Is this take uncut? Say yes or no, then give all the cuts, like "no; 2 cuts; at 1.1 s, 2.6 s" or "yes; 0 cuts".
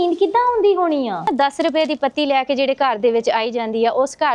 no; 1 cut; at 1.3 s